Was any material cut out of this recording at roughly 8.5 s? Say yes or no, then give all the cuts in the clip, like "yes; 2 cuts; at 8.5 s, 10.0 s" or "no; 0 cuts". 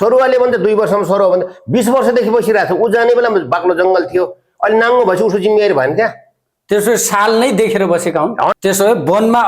yes; 1 cut; at 8.5 s